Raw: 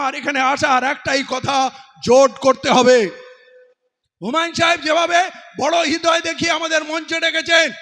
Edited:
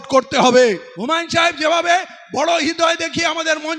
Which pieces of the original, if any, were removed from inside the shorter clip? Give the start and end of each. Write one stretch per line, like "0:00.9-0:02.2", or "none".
0:03.2-0:04.2